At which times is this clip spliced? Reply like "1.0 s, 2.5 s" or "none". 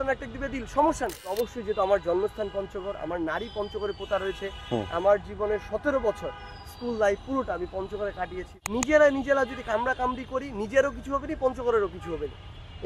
1.3 s, 8.5 s